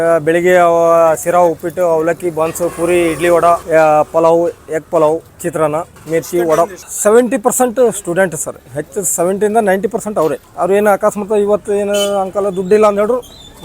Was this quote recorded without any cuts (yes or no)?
no